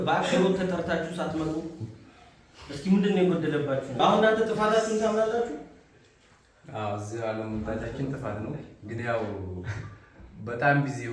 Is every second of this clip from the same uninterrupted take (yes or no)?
no